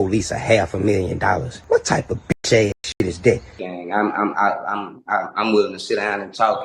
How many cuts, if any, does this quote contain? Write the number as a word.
one